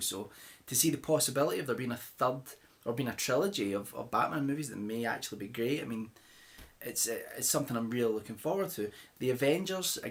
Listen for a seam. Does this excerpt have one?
no; 0 cuts

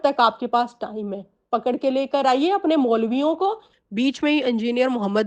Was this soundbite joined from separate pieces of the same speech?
yes; 1 cut; at 3.7 s

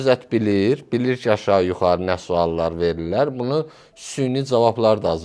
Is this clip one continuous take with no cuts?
yes; 0 cuts

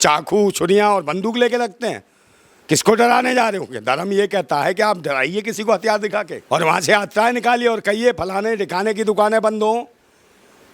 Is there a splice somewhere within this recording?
yes; 1 cut; at 6.4 s

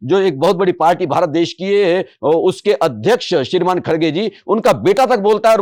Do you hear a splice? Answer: no; 0 cuts

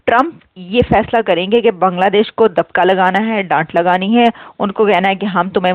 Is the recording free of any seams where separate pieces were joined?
yes; 0 cuts

